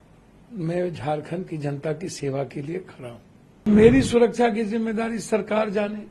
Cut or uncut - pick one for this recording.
cut